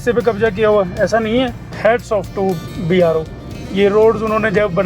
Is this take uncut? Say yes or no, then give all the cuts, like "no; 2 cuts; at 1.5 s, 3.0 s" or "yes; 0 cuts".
no; 1 cut; at 1.7 s